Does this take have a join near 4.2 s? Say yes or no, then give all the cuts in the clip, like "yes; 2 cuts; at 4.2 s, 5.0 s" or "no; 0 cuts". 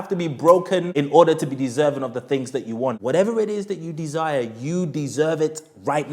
no; 2 cuts; at 0.9 s, 3.0 s